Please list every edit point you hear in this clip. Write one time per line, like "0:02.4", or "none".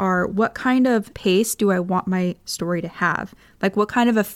none